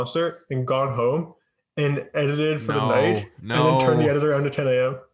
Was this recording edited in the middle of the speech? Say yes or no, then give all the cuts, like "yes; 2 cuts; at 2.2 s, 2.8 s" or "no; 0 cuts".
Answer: no; 0 cuts